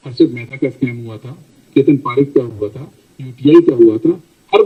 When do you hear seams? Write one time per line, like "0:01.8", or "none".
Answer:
none